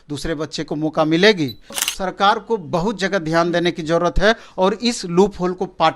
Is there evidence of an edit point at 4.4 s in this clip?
no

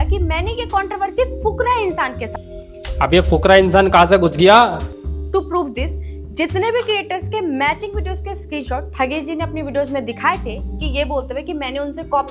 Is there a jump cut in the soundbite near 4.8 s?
yes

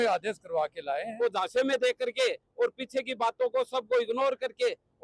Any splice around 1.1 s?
yes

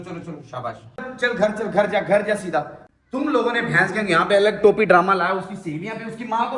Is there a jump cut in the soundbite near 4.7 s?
no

